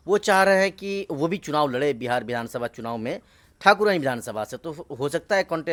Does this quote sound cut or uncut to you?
uncut